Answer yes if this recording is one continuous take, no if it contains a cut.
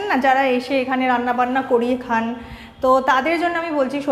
yes